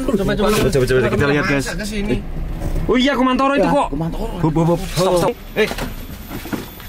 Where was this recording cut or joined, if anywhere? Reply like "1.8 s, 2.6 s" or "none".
5.3 s

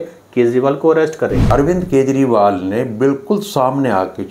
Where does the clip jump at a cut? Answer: 1.4 s

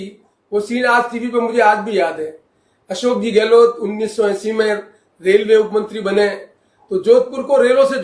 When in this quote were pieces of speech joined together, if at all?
none

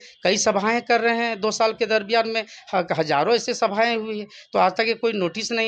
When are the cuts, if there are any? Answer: none

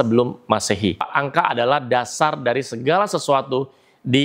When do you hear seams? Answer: 1.1 s

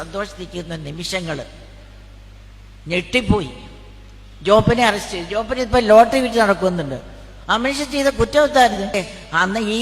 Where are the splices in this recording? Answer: 8.9 s

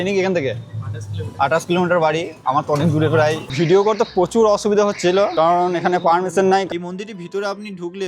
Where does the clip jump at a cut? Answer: 3.5 s, 6.7 s

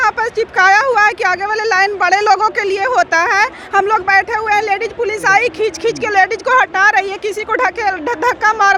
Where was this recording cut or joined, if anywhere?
none

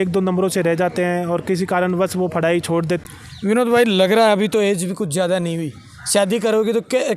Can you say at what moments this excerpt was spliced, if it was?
3.0 s

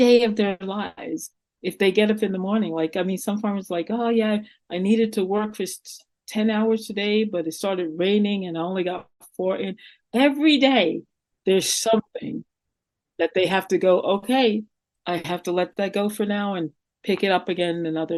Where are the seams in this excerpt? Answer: none

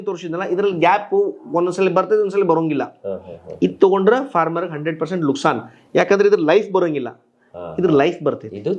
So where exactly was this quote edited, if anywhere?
none

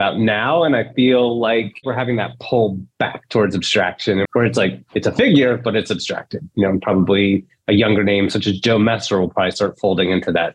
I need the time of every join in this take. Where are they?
1.8 s, 4.2 s

